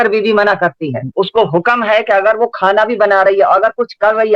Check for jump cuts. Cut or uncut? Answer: cut